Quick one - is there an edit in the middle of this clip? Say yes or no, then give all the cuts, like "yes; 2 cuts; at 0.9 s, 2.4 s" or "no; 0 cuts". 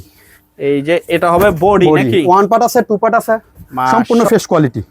yes; 1 cut; at 3.9 s